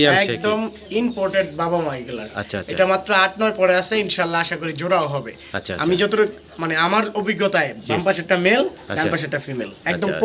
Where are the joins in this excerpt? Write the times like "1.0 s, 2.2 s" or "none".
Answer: none

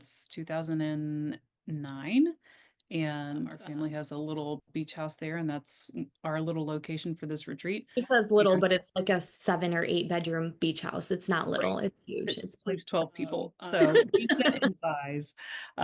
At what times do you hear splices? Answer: none

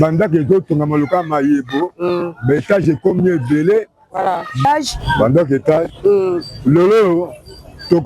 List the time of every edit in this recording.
4.5 s

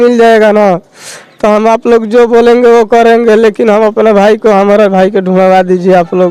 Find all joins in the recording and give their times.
none

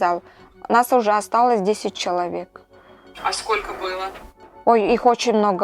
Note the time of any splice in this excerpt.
none

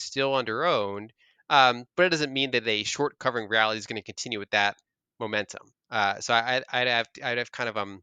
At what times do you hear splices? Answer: none

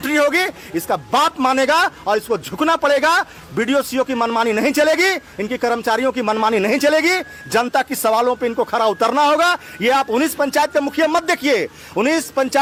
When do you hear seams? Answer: none

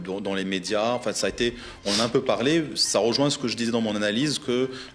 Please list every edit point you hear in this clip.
none

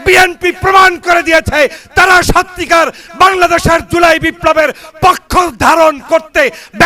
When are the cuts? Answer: none

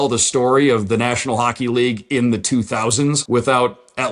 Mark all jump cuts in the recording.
3.2 s

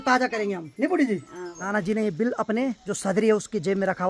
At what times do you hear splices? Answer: 1.7 s, 2.9 s

